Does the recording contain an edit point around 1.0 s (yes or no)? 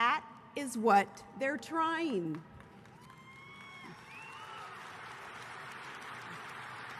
yes